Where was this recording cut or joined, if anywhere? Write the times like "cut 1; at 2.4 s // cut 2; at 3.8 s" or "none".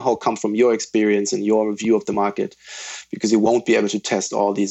none